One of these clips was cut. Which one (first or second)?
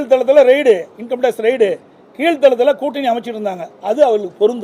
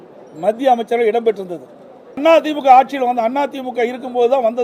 second